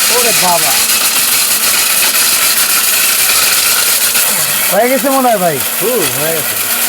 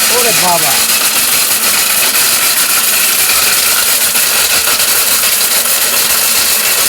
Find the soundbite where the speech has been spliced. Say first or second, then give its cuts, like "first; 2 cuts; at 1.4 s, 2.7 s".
first; 1 cut; at 4.2 s